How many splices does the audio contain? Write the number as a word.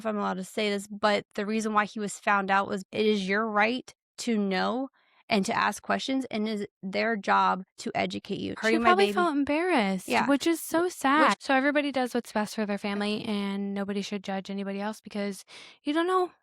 three